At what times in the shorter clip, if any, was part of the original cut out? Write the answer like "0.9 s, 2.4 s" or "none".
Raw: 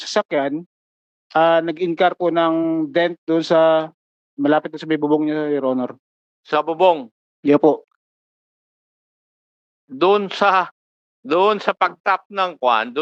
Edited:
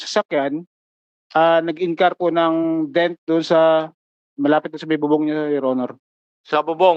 none